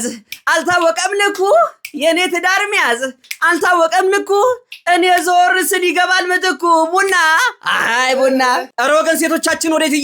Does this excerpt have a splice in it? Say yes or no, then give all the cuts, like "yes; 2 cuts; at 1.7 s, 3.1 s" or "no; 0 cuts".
yes; 1 cut; at 8.7 s